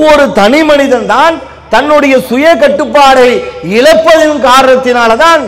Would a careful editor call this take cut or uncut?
uncut